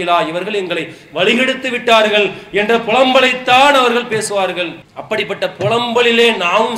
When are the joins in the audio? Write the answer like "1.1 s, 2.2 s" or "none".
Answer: none